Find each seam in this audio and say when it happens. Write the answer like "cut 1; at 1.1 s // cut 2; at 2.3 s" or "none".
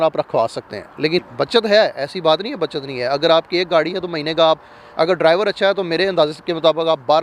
cut 1; at 1.3 s